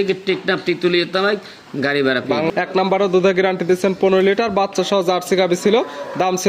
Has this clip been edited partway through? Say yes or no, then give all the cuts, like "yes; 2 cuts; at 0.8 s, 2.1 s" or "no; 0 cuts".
yes; 1 cut; at 2.5 s